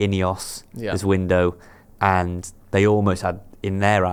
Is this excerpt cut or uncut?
uncut